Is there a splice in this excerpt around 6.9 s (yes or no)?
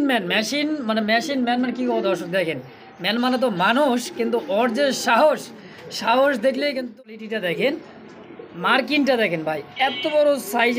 yes